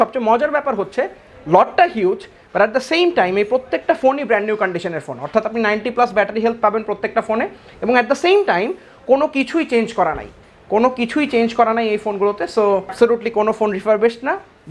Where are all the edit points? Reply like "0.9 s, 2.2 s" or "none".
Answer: none